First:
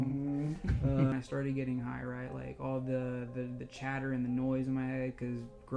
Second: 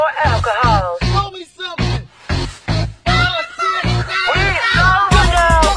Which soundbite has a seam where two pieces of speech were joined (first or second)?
first